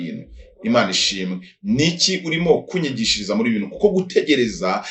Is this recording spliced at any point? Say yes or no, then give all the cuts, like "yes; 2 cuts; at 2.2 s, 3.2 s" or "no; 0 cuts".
no; 0 cuts